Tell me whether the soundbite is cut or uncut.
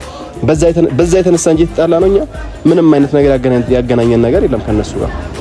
uncut